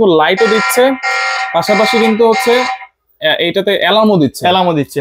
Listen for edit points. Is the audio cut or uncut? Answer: uncut